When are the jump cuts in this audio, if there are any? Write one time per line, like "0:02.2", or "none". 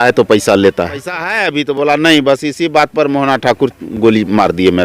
0:01.3

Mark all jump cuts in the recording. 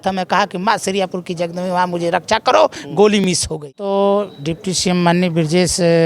0:03.8

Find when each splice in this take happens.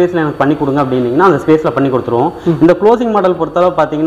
none

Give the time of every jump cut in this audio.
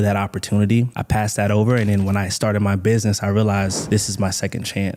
none

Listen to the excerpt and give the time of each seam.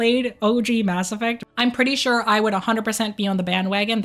0:01.4

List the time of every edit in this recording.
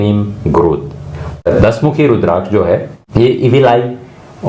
0:01.5
0:03.0

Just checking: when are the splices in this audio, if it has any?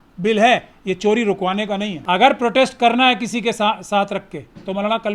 0:02.0

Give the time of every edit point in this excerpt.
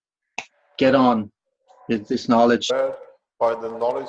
none

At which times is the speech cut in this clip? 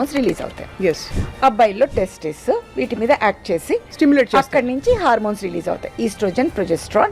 0:01.1

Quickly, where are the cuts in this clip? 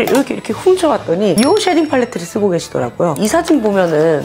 0:03.1

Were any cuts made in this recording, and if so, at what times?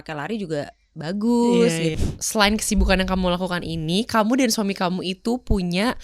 0:02.0

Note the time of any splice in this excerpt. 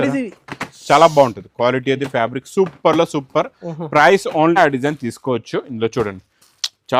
0:04.6

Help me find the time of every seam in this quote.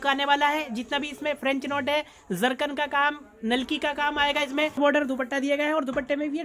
0:04.8

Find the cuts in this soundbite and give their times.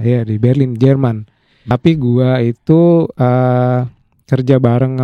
0:01.7

